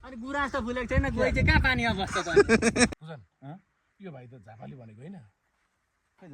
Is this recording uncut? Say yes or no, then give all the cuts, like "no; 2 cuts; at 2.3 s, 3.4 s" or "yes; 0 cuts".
no; 1 cut; at 2.9 s